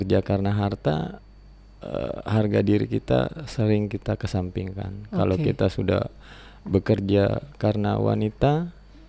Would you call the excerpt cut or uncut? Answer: uncut